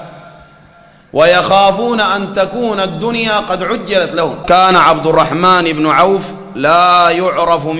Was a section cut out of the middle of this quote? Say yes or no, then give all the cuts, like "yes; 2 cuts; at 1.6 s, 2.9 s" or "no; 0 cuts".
yes; 1 cut; at 4.4 s